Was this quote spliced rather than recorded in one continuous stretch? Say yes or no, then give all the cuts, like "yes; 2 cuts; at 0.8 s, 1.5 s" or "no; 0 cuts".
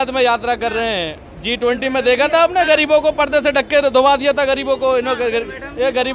no; 0 cuts